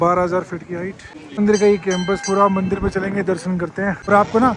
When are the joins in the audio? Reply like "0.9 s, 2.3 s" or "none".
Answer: none